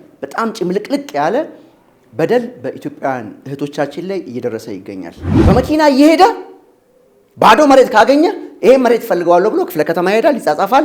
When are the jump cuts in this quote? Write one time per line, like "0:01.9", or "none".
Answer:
0:05.2

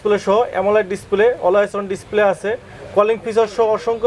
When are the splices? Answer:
none

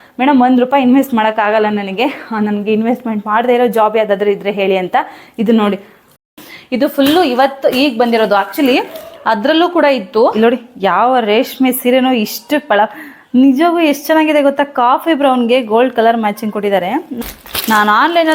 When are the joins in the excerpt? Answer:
0:06.3
0:10.3
0:17.1

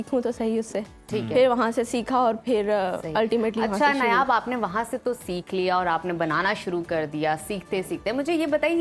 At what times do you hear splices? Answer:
none

